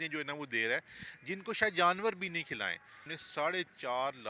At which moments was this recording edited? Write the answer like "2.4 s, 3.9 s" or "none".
3.1 s

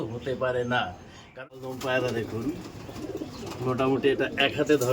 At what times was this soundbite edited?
1.4 s

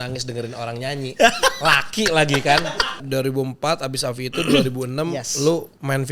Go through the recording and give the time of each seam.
3.0 s

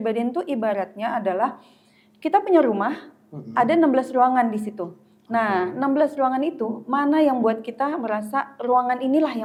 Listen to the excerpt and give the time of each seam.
none

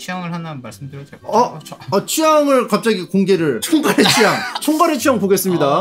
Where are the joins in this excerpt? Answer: 3.6 s, 4.6 s

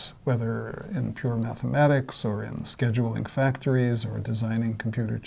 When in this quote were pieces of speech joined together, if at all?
none

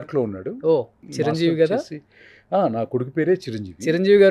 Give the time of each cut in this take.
1.0 s

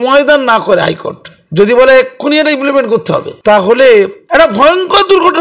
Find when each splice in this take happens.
3.3 s, 4.2 s

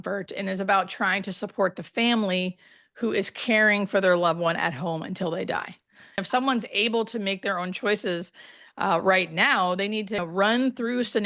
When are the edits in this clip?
6.2 s, 10.2 s

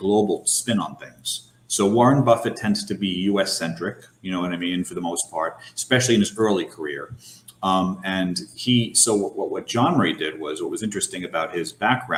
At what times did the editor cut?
none

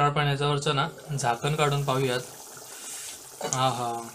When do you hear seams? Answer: none

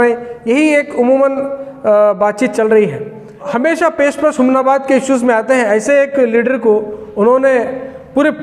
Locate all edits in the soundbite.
3.5 s

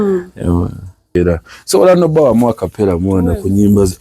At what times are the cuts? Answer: 1.2 s

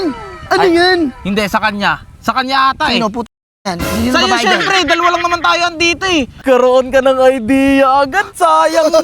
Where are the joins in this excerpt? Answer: 6.3 s

